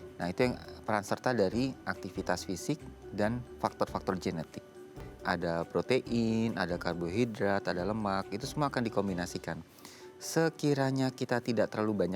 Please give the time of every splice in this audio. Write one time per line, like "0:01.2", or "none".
0:05.1